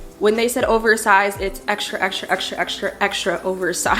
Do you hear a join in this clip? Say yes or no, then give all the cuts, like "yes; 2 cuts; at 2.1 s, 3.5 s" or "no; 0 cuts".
no; 0 cuts